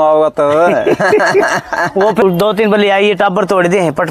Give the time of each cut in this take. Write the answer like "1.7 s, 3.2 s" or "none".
2.2 s